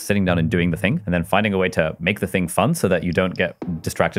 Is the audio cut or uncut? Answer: cut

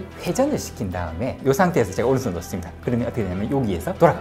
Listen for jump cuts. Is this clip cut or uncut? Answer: uncut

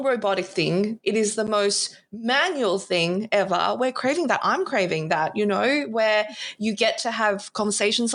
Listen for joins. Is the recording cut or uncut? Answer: uncut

